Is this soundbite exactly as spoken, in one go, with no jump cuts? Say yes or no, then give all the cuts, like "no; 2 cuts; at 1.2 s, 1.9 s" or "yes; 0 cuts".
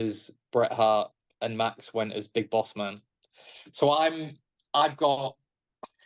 no; 1 cut; at 1.2 s